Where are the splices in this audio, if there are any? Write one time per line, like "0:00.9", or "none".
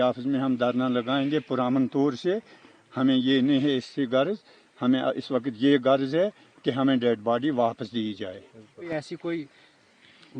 0:08.9